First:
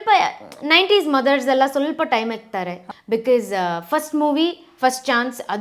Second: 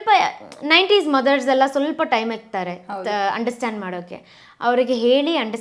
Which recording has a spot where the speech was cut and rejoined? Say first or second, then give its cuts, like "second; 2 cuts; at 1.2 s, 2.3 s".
first; 1 cut; at 2.8 s